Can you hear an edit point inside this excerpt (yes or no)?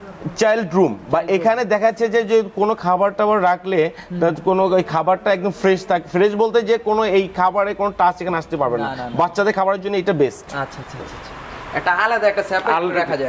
no